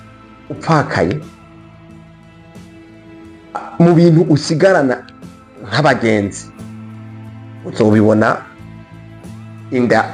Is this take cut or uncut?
uncut